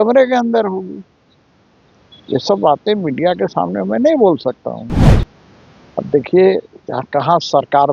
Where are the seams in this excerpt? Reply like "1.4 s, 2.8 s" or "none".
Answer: 5.0 s